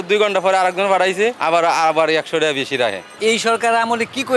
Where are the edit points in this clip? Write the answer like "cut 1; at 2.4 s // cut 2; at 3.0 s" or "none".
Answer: cut 1; at 1.4 s // cut 2; at 3.1 s